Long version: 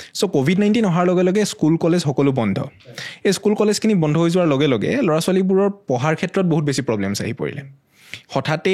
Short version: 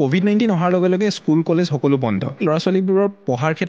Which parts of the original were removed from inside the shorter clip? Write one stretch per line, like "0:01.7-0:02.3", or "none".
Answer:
0:02.8-0:05.0